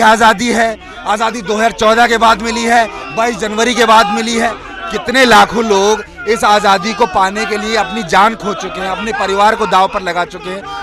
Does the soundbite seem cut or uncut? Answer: uncut